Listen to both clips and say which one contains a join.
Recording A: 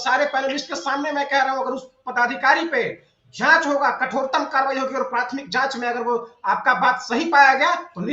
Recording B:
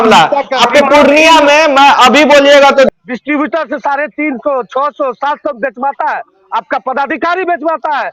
B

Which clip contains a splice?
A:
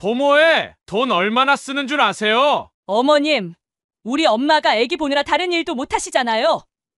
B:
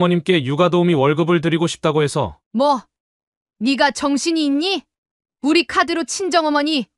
A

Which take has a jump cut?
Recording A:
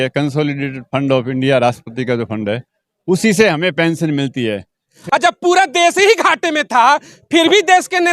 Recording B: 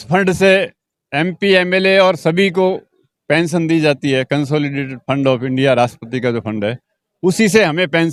A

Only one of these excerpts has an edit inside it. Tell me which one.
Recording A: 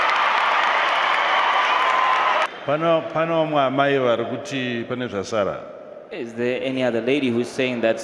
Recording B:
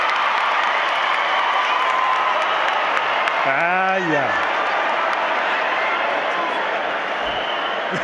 A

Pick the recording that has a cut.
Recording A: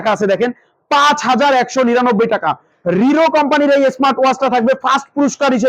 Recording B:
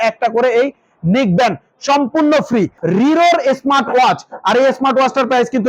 B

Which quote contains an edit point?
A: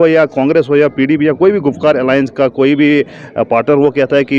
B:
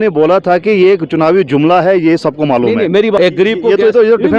B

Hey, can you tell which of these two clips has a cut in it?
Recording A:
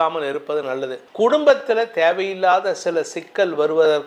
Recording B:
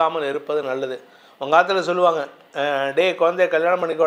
A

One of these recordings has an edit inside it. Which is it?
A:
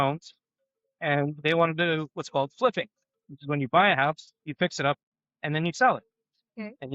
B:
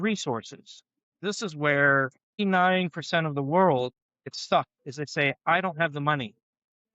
B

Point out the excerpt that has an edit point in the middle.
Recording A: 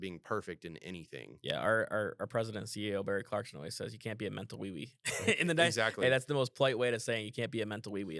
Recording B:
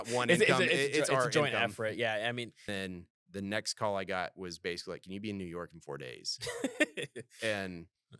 B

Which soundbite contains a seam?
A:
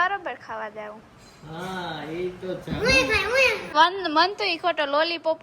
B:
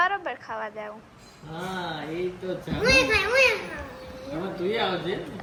A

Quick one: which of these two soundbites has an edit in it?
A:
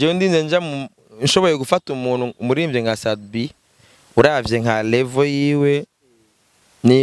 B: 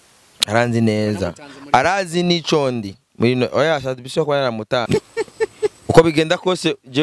B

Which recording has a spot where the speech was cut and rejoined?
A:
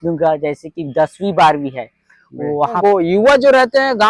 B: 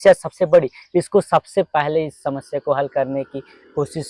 A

